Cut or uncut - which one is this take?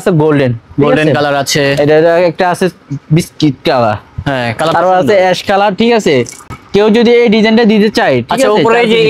uncut